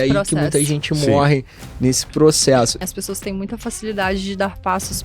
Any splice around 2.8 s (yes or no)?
yes